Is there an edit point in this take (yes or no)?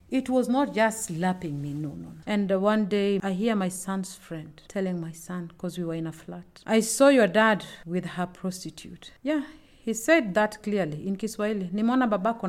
yes